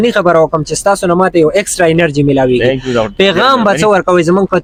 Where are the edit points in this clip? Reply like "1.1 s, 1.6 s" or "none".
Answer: none